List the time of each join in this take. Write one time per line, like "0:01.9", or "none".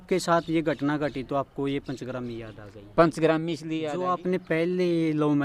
0:03.7